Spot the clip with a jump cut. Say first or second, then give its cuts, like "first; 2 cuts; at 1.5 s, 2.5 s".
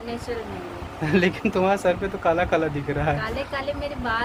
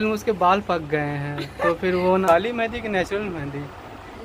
second; 1 cut; at 2.2 s